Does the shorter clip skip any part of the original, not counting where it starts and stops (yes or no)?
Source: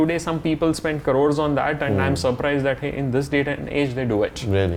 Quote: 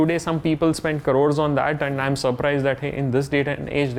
no